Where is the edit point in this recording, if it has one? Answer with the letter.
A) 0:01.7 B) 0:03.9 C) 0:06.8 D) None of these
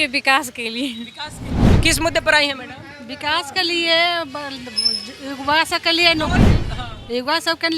A